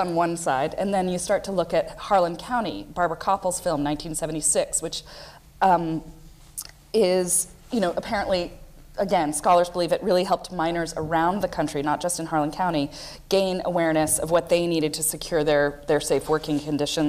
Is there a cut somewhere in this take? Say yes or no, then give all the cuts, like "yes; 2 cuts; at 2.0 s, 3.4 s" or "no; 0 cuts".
yes; 1 cut; at 13.4 s